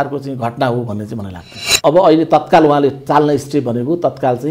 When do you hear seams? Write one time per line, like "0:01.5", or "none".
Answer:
0:01.6